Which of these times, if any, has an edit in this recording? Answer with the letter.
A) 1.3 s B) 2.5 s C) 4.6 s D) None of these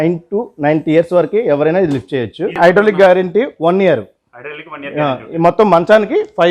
B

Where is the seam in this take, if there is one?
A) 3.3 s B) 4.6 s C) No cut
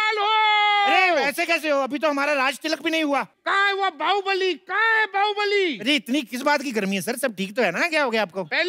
A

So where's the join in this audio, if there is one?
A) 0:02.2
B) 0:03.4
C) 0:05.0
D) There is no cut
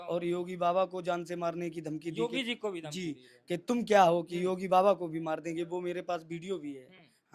D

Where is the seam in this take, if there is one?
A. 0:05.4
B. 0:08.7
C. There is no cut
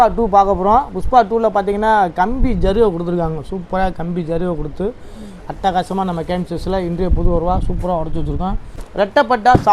B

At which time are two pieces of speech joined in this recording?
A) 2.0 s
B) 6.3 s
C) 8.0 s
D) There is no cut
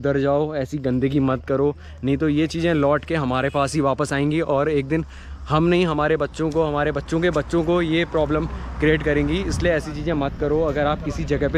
D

